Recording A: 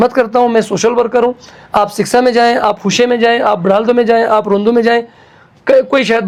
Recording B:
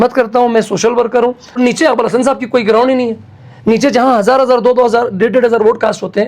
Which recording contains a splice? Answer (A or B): B